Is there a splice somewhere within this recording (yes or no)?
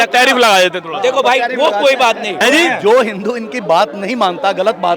yes